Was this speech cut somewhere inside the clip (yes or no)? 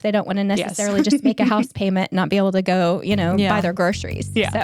no